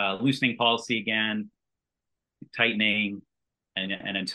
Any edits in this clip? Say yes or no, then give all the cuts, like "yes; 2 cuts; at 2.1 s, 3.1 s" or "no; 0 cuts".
yes; 1 cut; at 2.0 s